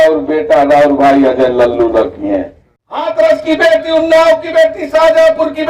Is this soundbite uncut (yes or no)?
no